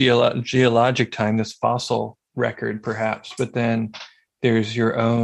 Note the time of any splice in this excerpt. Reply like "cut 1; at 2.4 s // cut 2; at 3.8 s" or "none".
cut 1; at 2.2 s